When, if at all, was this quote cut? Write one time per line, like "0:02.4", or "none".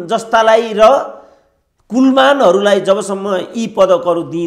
none